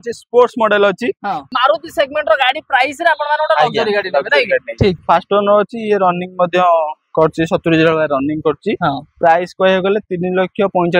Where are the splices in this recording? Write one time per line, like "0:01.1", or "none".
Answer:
0:01.5
0:05.0